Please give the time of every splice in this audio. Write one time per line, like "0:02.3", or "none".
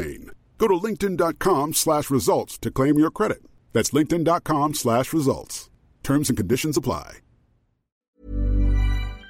0:08.1